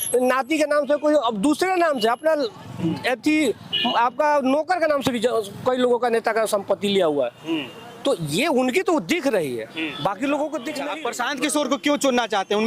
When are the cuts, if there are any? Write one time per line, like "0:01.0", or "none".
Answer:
0:10.8